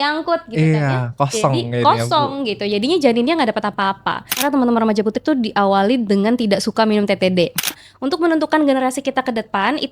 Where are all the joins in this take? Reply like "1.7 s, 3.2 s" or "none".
4.4 s, 7.9 s

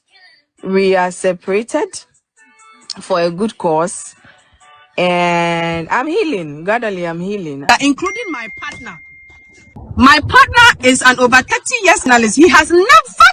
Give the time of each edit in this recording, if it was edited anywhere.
7.7 s, 9.7 s, 12.1 s

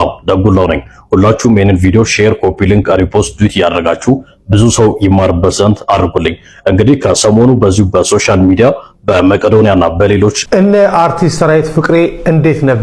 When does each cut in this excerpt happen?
10.4 s

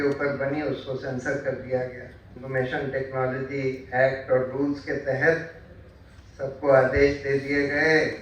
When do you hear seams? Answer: 2.3 s

